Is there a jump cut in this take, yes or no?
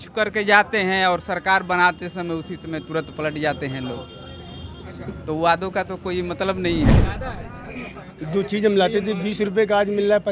yes